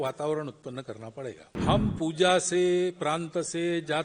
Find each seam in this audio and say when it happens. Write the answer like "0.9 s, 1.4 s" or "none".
1.5 s